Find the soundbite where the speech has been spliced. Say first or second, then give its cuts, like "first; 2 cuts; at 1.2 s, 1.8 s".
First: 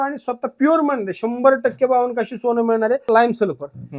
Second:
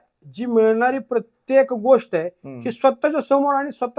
first; 1 cut; at 3.0 s